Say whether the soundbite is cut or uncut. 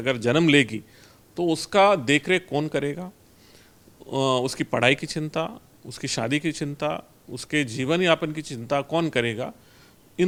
uncut